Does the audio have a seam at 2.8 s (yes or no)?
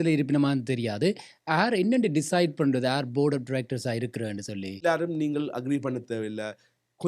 no